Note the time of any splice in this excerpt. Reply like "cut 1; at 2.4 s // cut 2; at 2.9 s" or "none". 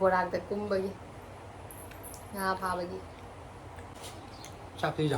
cut 1; at 3.9 s